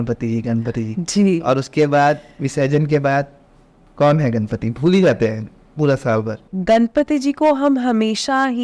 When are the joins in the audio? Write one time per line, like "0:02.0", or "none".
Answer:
0:06.5